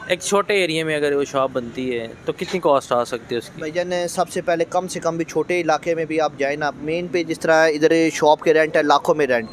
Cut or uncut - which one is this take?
uncut